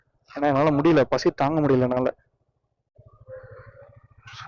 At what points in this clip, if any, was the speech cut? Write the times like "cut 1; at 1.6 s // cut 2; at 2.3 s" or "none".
cut 1; at 2.9 s